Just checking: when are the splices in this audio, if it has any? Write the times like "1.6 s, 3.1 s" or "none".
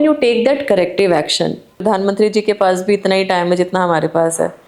1.8 s